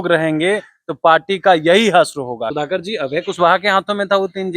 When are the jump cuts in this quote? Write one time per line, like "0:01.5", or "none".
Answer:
0:02.5